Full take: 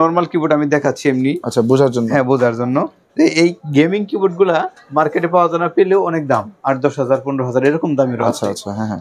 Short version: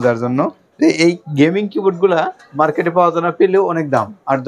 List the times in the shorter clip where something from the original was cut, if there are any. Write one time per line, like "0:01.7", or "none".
none